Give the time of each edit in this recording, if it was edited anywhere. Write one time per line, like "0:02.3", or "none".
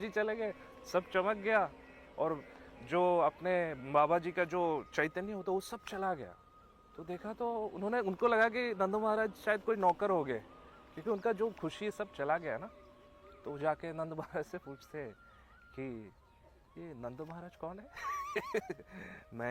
none